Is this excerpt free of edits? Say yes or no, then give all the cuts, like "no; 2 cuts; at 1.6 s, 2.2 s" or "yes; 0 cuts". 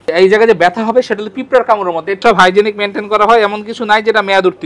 no; 1 cut; at 2.2 s